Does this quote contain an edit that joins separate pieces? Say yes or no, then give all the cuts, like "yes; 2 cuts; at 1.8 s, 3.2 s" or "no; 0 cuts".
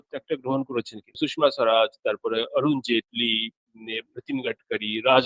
yes; 1 cut; at 1.2 s